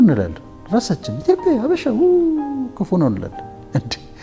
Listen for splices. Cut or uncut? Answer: uncut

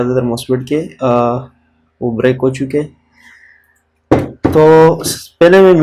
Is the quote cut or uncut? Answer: uncut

